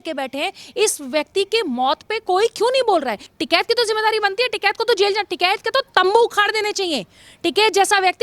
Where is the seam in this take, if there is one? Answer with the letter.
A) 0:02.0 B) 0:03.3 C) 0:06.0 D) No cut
B